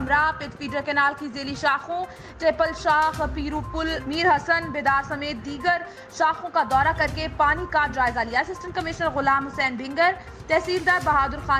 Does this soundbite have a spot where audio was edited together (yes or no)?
no